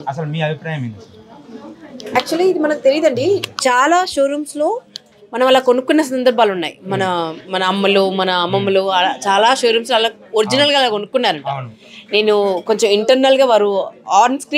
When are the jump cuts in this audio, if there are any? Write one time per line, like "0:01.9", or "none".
none